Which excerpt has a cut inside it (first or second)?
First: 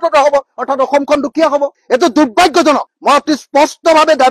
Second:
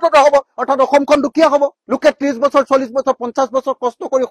first